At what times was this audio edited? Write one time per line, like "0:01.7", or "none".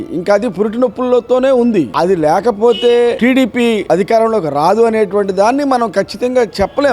0:03.2